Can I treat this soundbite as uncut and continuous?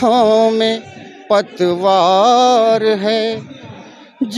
yes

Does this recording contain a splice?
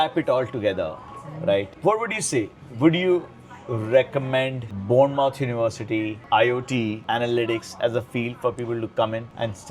no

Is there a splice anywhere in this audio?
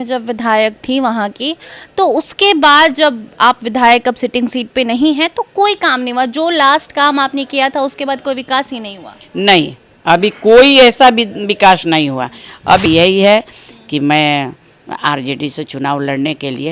yes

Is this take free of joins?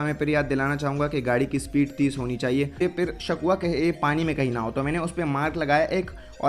no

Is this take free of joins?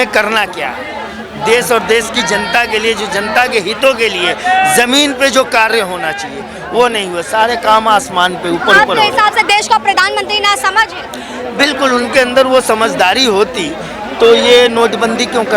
yes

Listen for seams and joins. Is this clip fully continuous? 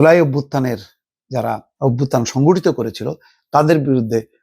no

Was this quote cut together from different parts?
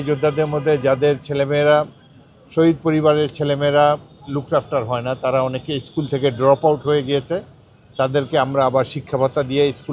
no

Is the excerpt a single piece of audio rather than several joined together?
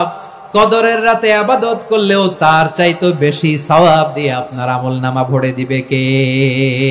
no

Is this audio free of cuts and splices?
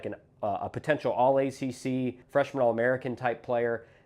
no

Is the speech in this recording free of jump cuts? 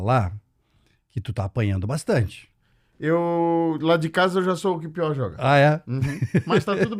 yes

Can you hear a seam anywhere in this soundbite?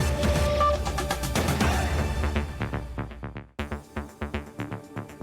yes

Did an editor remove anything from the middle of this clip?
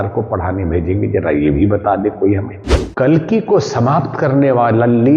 yes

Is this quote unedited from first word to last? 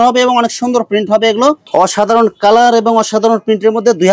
no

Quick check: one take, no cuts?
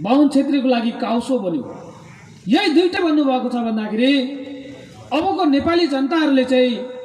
no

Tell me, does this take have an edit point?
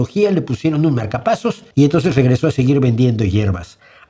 yes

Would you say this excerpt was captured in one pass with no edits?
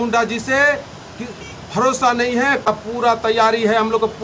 no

